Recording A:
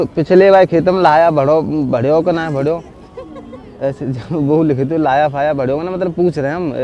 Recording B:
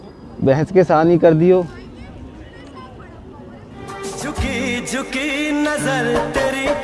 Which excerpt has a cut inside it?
B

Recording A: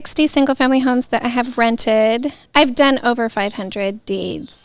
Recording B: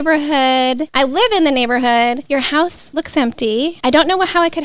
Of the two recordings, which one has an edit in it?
B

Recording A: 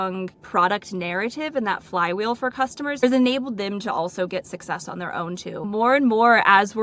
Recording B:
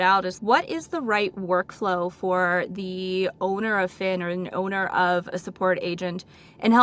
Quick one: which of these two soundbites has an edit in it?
A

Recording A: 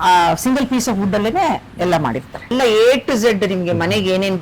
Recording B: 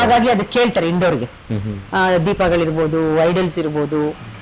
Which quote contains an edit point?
A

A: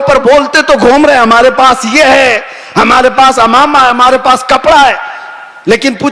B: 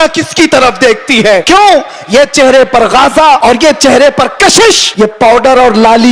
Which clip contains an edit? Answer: B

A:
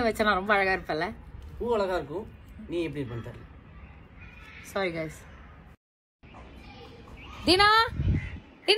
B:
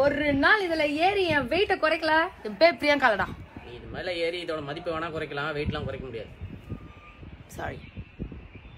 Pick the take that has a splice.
B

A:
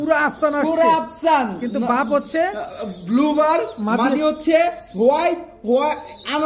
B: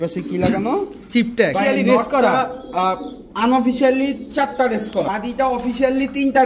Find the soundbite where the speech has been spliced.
B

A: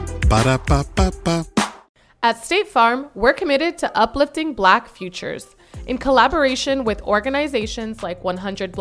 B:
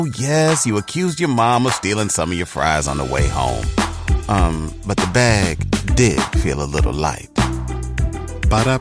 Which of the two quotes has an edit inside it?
A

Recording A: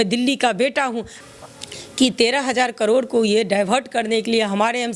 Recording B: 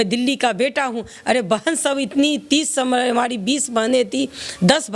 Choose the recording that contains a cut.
A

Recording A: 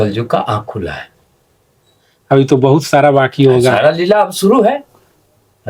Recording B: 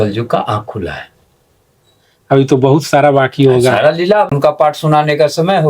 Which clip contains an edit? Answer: B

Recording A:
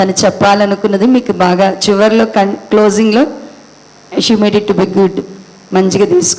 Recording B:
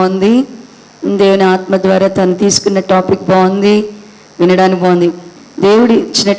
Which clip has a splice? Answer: B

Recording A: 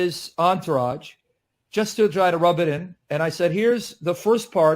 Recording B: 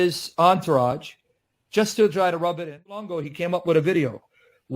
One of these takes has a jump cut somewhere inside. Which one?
B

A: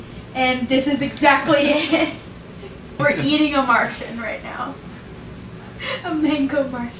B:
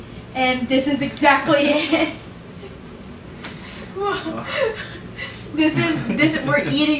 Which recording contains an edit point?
A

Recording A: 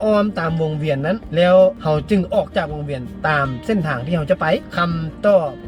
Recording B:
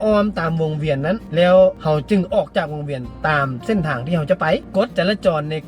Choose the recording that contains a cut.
B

